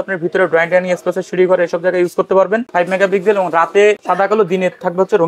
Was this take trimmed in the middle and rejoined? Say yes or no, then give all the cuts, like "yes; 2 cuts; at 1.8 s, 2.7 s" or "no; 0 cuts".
yes; 2 cuts; at 2.7 s, 4.0 s